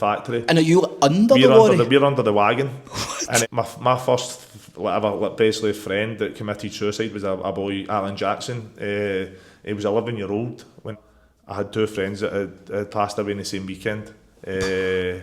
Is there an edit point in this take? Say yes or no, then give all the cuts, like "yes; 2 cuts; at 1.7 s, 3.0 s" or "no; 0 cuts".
yes; 2 cuts; at 3.4 s, 10.9 s